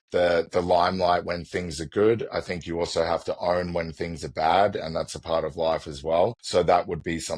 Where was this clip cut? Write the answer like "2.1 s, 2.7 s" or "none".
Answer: 6.4 s